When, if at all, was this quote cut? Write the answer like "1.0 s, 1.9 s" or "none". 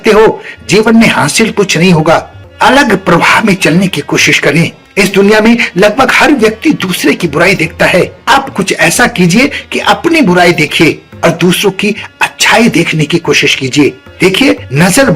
2.4 s